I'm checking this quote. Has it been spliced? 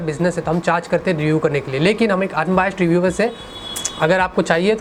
no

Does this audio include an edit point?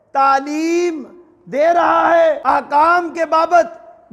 yes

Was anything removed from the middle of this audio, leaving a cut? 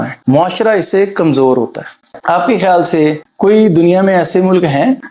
yes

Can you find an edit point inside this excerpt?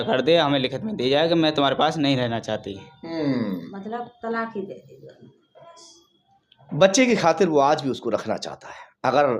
no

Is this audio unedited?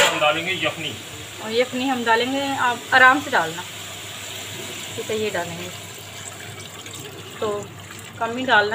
yes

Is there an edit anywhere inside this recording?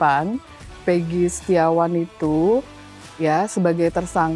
no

